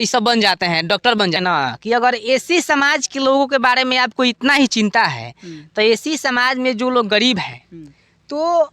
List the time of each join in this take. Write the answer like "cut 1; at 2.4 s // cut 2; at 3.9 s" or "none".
cut 1; at 1.3 s

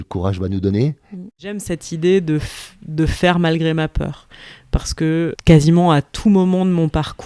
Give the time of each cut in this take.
cut 1; at 1.6 s // cut 2; at 5.4 s

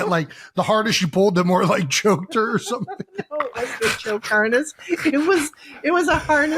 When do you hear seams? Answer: none

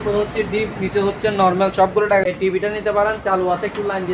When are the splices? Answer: cut 1; at 2.4 s

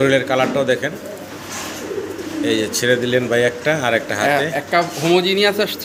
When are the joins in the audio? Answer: none

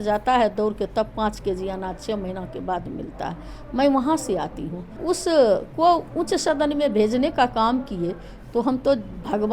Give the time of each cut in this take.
cut 1; at 4.9 s

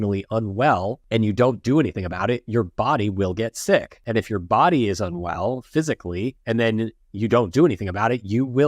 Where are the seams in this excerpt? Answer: cut 1; at 1.0 s // cut 2; at 4.0 s // cut 3; at 6.4 s

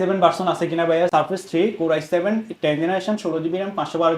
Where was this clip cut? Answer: cut 1; at 1.1 s

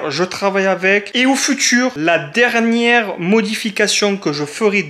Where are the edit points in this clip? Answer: cut 1; at 1.1 s

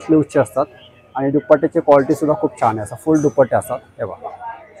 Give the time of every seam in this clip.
none

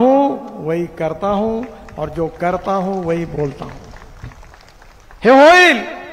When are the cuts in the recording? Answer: none

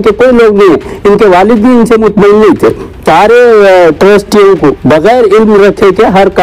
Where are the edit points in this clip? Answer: cut 1; at 3.0 s // cut 2; at 4.8 s

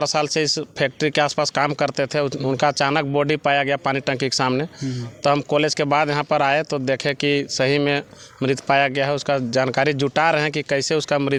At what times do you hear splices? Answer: none

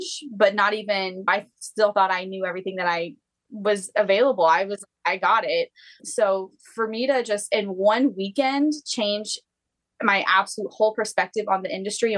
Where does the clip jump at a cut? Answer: none

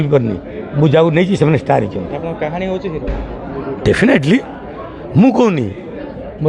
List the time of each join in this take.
none

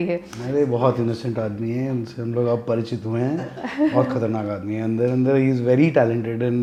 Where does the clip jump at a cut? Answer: none

